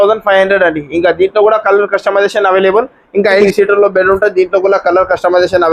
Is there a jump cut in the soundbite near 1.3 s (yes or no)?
no